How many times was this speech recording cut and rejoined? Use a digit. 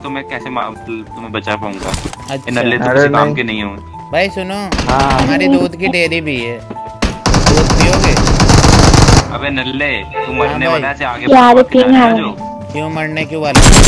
1